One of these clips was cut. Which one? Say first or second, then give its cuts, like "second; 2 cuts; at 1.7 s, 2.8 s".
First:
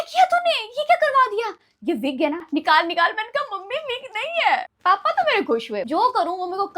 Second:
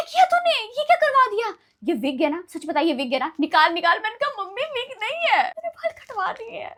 first; 3 cuts; at 2.4 s, 4.7 s, 5.9 s